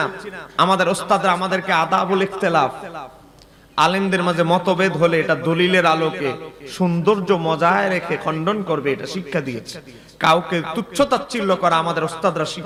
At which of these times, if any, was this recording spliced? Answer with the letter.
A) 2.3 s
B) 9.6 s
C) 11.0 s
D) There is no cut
D